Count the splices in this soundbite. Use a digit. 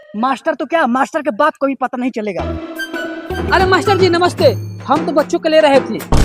1